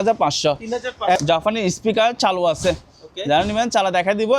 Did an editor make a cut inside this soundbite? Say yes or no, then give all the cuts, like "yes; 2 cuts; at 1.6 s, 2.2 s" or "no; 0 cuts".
yes; 1 cut; at 1.2 s